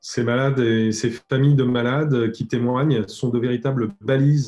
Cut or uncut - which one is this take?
uncut